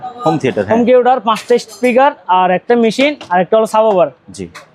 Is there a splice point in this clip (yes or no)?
no